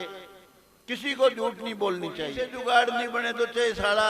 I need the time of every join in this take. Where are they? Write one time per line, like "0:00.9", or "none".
0:02.4